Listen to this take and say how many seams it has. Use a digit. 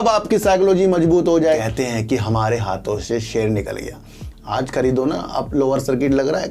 1